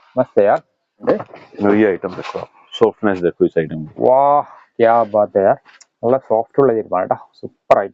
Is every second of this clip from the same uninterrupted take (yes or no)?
no